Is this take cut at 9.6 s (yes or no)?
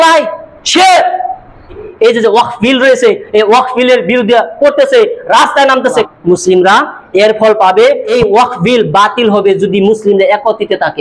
no